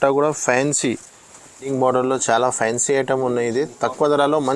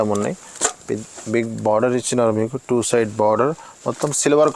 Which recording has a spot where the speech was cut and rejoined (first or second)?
first